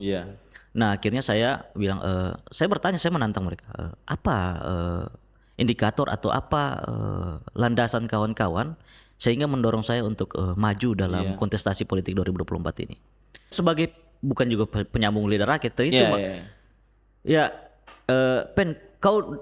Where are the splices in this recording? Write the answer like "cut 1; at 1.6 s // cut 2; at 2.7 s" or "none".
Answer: cut 1; at 13.5 s